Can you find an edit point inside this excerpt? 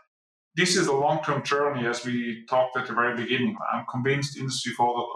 yes; 1 cut; at 3.6 s

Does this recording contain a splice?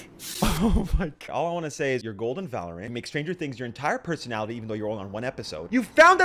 yes; 1 cut; at 1.2 s

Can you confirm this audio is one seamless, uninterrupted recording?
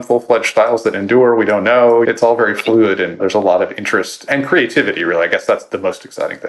no; 4 cuts; at 2.0 s, 3.2 s, 4.3 s, 5.6 s

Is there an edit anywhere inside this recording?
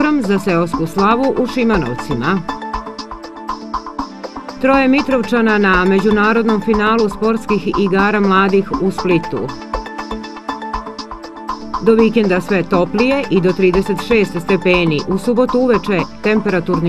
no; 0 cuts

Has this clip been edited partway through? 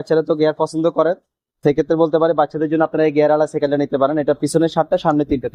no; 0 cuts

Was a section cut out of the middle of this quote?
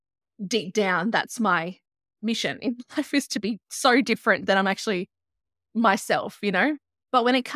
no; 0 cuts

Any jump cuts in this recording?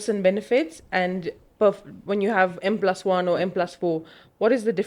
no; 0 cuts

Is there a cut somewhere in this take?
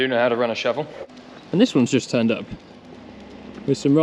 yes; 1 cut; at 1.0 s

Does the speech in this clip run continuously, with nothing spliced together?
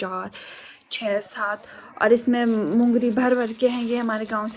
yes; 0 cuts

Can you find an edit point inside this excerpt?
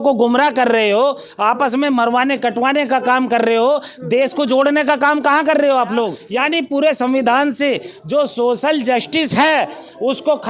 yes; 1 cut; at 6.2 s

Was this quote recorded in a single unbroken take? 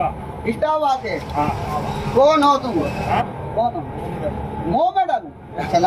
yes; 0 cuts

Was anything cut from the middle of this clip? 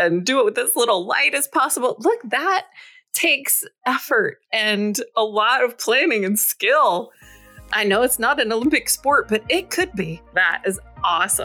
yes; 1 cut; at 10.4 s

